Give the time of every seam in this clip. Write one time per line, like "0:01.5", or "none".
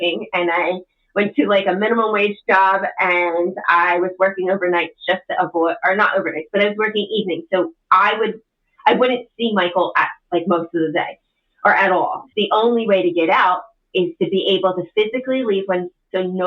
0:12.3